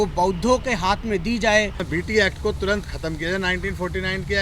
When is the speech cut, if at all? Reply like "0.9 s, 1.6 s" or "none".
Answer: 1.9 s